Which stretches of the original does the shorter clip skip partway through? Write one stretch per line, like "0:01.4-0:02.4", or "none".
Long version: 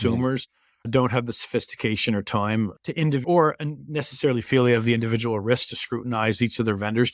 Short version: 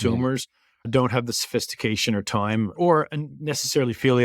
0:02.7-0:03.2